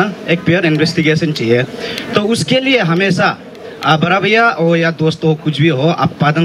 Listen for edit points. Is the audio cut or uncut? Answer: uncut